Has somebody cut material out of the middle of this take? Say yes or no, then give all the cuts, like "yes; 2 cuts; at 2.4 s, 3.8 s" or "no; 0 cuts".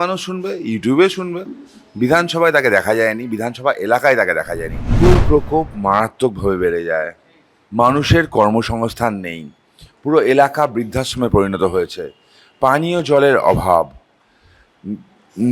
yes; 1 cut; at 5.0 s